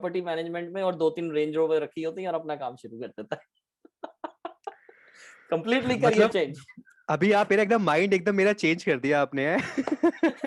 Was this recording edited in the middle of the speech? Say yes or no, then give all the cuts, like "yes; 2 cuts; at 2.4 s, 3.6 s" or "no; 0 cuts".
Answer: no; 0 cuts